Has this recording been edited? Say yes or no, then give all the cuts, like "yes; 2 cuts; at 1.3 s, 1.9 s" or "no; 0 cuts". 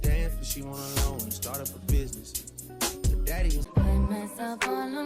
yes; 1 cut; at 3.7 s